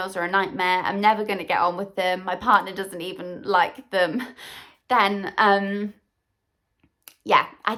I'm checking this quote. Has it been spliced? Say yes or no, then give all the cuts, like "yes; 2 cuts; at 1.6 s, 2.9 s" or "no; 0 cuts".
no; 0 cuts